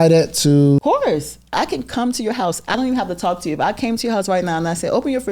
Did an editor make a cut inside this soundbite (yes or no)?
yes